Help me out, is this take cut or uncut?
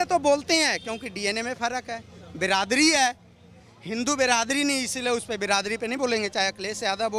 uncut